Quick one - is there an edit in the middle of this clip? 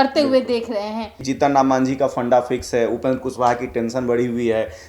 yes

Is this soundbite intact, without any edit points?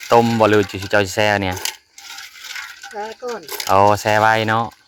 yes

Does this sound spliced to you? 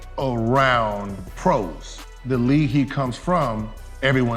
yes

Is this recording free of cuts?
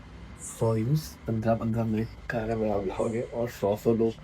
yes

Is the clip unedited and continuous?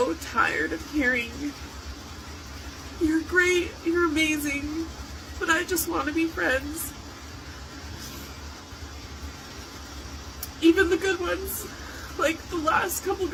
yes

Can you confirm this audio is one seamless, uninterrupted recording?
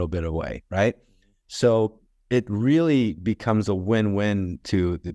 yes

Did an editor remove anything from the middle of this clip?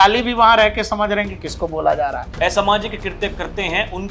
yes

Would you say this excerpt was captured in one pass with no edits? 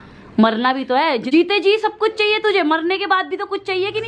no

